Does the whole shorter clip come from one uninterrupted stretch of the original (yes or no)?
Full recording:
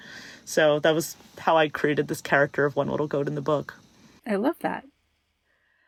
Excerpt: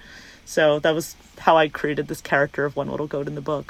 yes